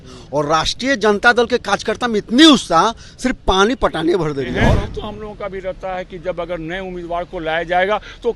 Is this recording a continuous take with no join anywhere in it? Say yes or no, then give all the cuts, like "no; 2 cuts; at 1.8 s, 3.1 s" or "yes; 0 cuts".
no; 1 cut; at 4.6 s